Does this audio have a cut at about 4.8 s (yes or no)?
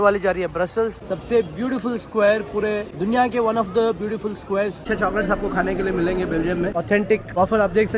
yes